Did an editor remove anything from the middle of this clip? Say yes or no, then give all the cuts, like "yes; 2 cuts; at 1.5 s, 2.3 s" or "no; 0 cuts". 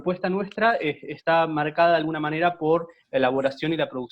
no; 0 cuts